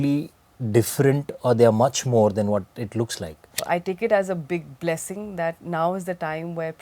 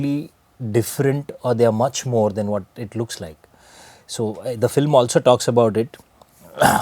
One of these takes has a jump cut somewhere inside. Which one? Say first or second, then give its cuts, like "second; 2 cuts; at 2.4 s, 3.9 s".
first; 1 cut; at 3.6 s